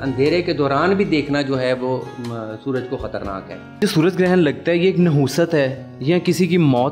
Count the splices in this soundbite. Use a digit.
1